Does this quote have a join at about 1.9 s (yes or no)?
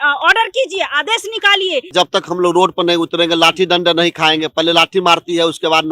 yes